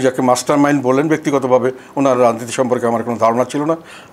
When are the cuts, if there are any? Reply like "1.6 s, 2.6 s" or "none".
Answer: none